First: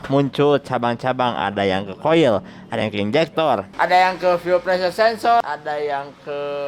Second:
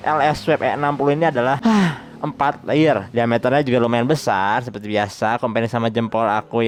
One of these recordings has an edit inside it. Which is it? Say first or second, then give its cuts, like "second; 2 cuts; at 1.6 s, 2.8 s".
first; 1 cut; at 5.4 s